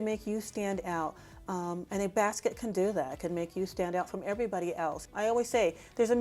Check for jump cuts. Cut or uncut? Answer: cut